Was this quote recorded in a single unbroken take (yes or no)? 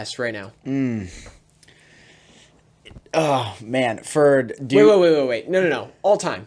yes